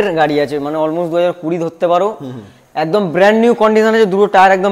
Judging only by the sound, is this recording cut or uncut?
uncut